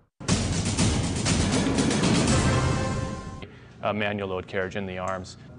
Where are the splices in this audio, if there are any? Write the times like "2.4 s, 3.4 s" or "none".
none